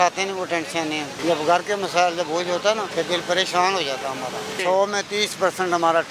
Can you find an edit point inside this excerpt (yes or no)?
yes